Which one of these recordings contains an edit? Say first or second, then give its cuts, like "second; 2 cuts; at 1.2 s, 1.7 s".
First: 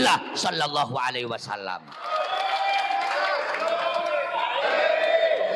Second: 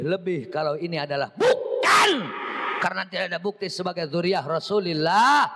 first; 1 cut; at 4.6 s